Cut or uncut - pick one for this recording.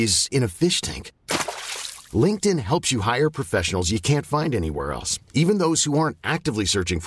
uncut